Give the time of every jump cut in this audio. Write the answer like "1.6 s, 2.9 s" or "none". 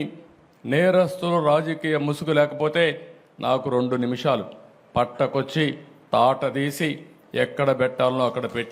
none